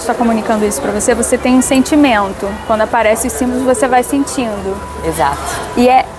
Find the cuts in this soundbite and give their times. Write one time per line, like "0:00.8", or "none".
none